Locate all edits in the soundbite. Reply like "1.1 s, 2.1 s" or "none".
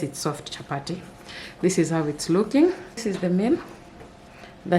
3.1 s